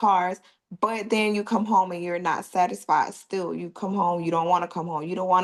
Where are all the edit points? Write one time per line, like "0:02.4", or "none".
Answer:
none